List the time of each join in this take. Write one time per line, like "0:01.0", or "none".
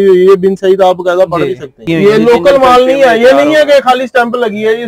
0:01.8